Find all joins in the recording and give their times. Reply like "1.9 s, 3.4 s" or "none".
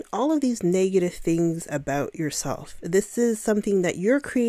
none